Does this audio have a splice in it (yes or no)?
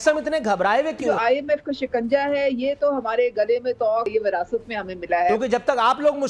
yes